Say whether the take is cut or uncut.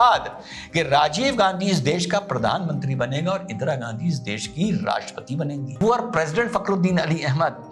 cut